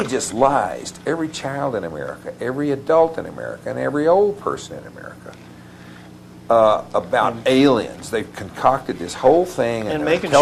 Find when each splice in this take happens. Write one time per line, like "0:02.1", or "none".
none